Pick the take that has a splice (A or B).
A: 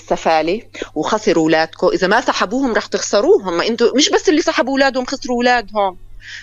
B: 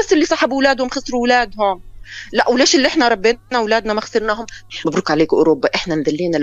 B